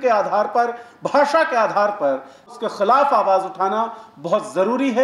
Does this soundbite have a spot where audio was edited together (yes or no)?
yes